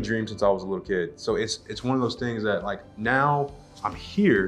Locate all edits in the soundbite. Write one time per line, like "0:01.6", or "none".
none